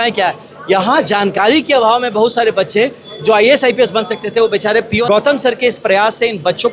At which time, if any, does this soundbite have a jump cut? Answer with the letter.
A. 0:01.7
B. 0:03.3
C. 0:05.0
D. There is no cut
C